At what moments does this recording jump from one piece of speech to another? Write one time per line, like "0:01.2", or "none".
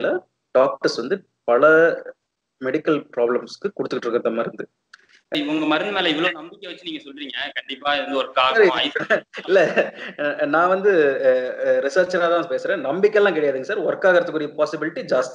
0:05.3